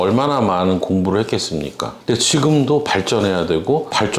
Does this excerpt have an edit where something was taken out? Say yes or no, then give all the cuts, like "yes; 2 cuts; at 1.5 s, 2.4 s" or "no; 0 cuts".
yes; 1 cut; at 2.0 s